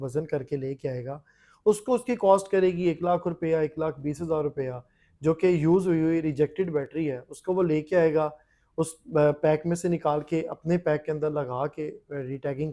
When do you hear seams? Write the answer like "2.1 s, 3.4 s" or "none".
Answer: none